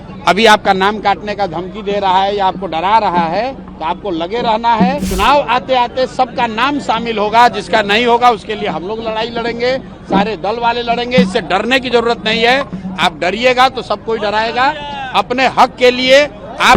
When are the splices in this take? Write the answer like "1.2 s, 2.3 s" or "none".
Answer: 5.1 s